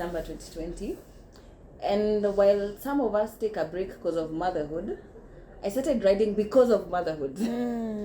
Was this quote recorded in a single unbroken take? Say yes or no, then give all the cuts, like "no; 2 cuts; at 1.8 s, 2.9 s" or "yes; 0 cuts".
yes; 0 cuts